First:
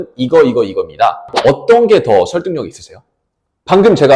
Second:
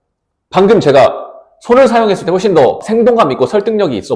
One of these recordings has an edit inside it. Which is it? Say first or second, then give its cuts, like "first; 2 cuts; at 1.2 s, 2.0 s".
first; 1 cut; at 1.3 s